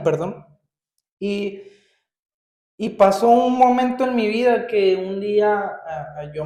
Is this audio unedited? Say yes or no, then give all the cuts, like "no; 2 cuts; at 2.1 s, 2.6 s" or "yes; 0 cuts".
yes; 0 cuts